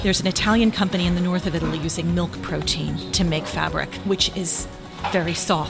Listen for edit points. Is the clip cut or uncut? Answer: uncut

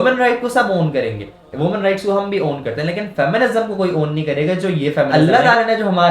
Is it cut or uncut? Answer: cut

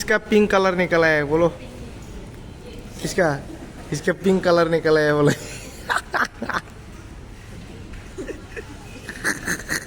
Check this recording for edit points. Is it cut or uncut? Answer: uncut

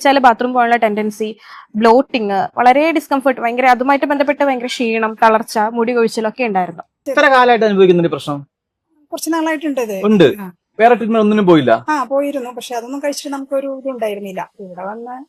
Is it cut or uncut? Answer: cut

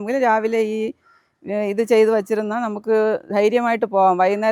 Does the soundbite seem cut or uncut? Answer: uncut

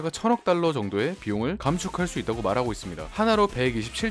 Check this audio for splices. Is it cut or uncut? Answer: uncut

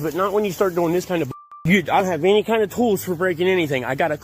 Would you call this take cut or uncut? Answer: cut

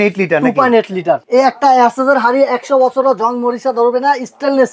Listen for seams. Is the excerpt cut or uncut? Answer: cut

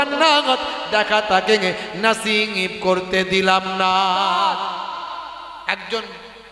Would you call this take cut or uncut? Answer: cut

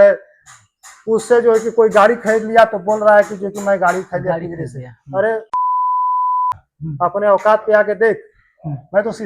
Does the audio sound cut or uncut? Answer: cut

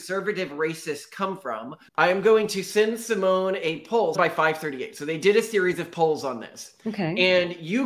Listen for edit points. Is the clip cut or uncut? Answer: cut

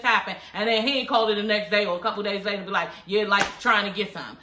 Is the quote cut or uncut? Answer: uncut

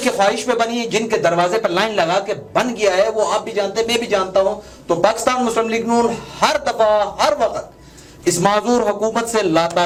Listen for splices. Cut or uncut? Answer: uncut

